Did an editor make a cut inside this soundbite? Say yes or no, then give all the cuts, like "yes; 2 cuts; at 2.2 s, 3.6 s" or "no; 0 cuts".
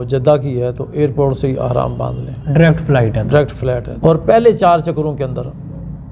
yes; 1 cut; at 3.9 s